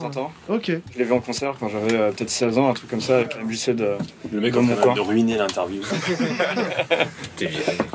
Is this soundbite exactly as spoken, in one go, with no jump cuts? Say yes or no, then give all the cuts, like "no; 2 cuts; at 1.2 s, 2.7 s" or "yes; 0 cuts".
yes; 0 cuts